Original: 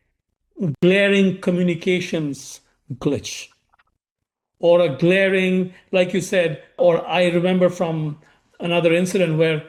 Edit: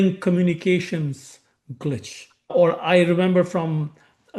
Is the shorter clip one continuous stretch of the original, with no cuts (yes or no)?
no